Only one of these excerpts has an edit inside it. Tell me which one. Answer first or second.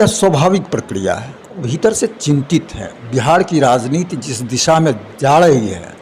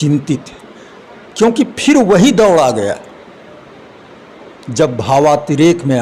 first